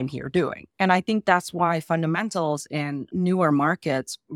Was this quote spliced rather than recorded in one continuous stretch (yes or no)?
no